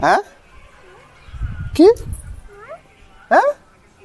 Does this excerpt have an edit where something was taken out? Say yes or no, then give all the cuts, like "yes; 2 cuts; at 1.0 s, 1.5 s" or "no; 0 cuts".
no; 0 cuts